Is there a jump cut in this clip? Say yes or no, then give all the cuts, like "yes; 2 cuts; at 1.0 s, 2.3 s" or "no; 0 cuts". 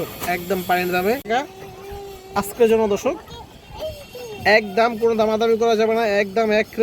yes; 1 cut; at 1.3 s